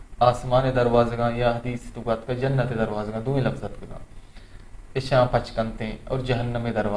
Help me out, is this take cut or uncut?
uncut